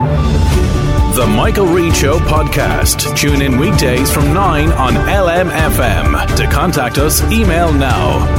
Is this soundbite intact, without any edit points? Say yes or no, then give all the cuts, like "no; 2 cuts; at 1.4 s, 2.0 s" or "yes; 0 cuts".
yes; 0 cuts